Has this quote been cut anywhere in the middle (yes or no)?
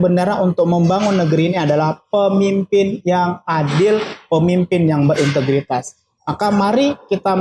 no